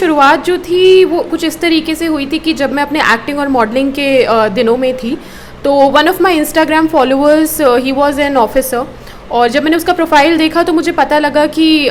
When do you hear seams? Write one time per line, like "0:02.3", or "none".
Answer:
none